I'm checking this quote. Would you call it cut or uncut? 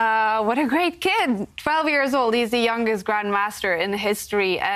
uncut